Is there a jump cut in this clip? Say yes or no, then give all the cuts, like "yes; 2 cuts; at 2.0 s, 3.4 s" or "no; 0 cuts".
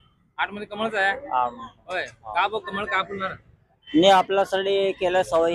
no; 0 cuts